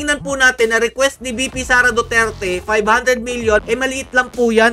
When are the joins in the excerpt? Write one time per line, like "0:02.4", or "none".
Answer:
0:03.6